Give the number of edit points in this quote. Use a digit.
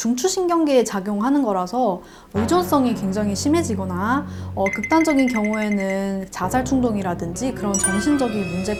0